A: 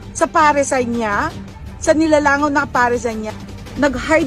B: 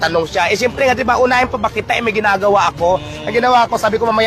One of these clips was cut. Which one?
A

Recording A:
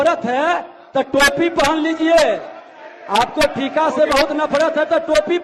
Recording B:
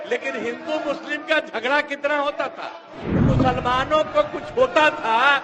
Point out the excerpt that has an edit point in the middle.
B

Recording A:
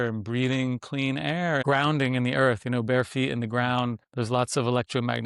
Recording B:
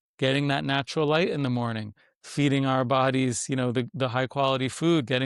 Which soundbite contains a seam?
A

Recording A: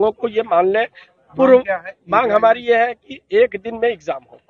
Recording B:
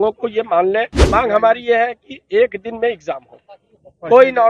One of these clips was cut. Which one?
B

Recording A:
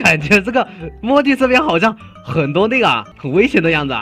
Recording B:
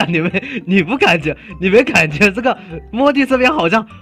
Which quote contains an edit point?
A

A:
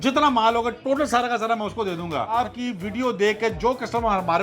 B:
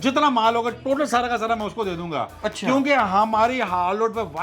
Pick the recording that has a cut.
A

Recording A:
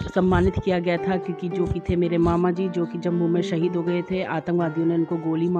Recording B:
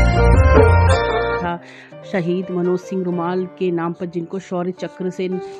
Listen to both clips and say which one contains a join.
B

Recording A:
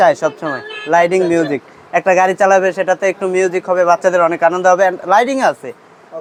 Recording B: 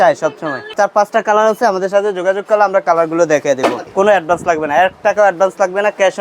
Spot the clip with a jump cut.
B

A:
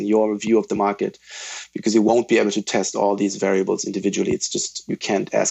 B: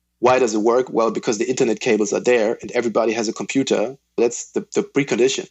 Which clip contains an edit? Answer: B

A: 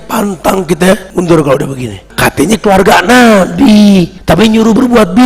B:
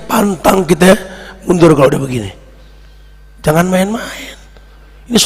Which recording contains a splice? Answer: A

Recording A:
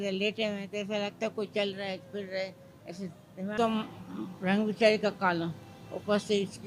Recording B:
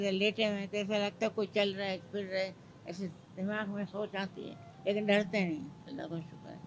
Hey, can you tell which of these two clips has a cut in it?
A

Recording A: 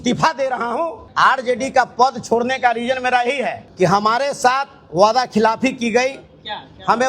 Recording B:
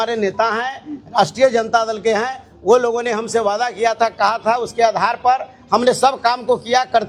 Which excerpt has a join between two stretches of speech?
A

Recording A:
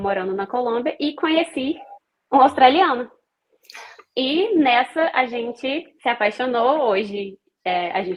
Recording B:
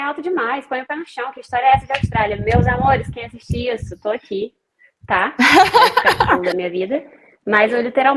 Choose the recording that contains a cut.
B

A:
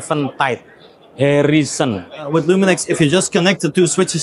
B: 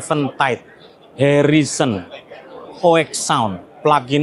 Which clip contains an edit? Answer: A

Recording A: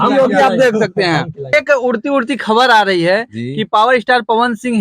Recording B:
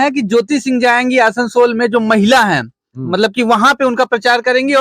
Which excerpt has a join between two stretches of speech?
A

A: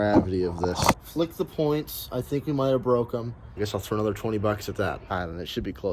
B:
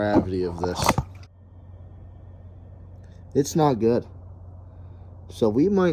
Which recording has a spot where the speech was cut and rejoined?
A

